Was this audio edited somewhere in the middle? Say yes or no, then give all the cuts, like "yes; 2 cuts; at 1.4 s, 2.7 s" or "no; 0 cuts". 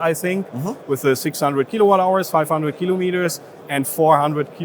no; 0 cuts